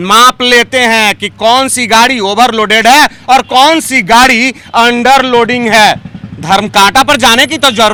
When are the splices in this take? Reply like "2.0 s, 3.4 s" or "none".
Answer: none